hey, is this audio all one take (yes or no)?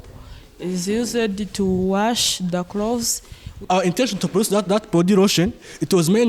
no